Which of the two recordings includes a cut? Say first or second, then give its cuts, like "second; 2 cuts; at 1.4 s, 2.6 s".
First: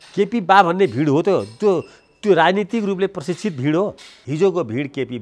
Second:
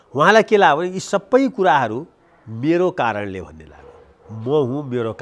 first; 1 cut; at 4.1 s